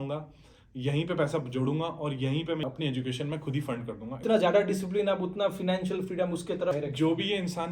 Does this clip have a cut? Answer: yes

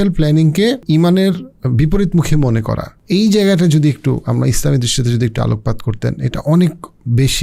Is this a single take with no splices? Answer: no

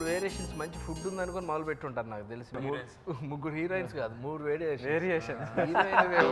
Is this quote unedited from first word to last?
no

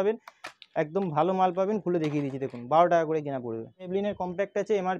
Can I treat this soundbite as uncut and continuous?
no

